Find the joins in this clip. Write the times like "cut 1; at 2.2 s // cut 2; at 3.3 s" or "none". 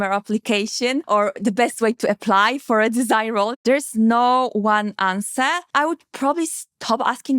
cut 1; at 1.0 s // cut 2; at 3.5 s // cut 3; at 5.6 s

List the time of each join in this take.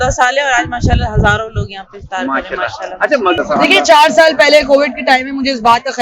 cut 1; at 3.4 s

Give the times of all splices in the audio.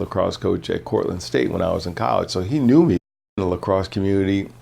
cut 1; at 3.2 s

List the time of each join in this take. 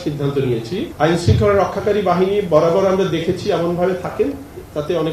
none

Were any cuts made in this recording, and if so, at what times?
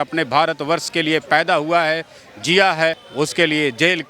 cut 1; at 3.0 s

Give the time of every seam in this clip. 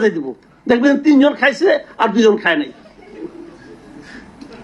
none

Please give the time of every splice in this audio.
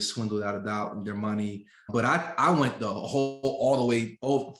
cut 1; at 1.9 s

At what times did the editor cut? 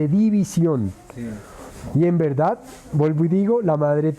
none

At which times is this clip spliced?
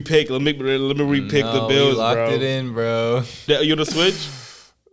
cut 1; at 3.4 s

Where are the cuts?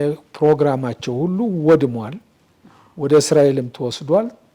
none

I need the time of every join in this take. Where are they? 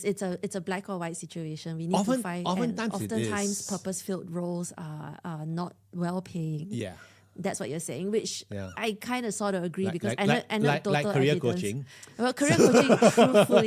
none

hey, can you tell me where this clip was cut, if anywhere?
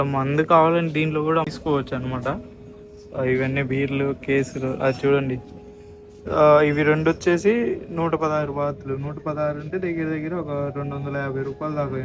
cut 1; at 1.5 s

